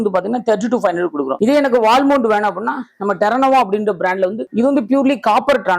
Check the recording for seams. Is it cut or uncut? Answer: uncut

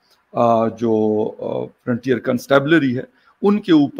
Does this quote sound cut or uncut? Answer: uncut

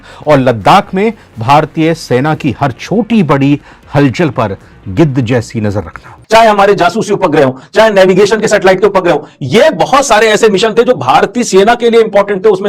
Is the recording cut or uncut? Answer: cut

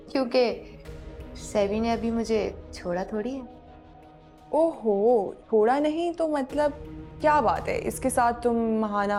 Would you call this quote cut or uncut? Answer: uncut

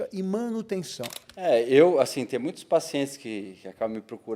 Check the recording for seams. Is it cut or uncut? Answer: cut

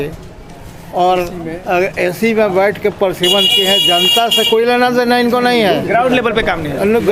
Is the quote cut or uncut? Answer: uncut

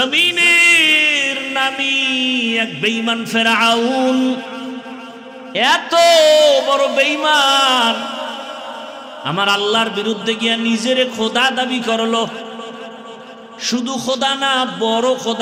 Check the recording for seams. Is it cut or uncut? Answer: uncut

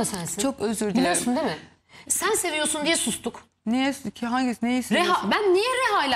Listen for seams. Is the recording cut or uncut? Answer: uncut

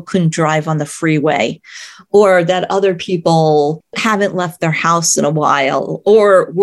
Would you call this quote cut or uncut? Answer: uncut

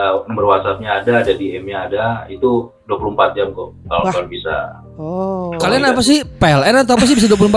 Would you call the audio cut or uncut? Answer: uncut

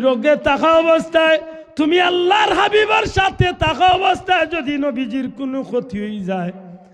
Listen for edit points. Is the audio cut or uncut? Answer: uncut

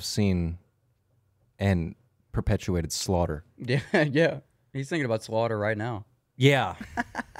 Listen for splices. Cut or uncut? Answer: uncut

